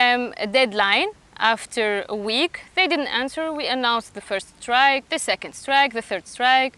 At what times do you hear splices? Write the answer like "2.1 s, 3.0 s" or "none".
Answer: 5.1 s